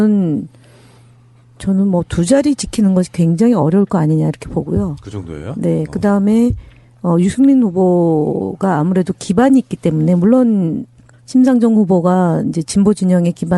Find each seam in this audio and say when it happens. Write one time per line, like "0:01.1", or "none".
0:06.0